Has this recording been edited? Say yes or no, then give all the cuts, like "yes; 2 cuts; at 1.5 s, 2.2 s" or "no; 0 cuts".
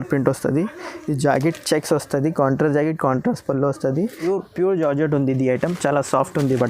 yes; 1 cut; at 4.2 s